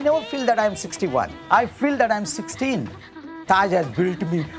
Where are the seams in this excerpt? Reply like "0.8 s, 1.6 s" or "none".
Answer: 1.4 s, 3.3 s